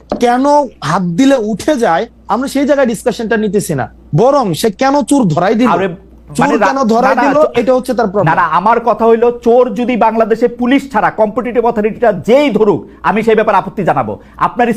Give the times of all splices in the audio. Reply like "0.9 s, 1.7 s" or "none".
none